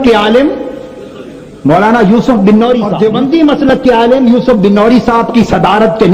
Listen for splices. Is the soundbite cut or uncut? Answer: cut